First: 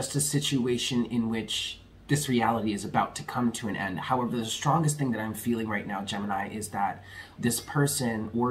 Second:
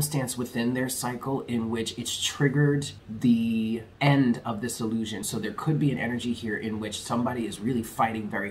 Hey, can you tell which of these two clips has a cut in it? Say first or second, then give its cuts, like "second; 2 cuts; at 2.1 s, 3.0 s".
second; 3 cuts; at 3.0 s, 3.9 s, 5.2 s